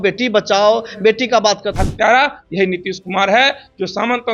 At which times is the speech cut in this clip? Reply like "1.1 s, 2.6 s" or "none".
1.7 s